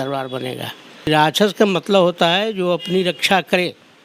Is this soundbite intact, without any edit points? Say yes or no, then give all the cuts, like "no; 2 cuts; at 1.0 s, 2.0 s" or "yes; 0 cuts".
no; 1 cut; at 1.1 s